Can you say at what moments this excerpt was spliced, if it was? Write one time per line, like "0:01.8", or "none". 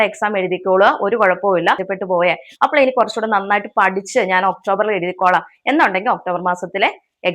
0:01.9